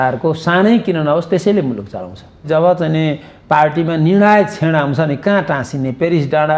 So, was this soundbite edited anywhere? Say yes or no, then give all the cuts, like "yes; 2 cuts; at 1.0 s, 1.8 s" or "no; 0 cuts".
yes; 1 cut; at 2.4 s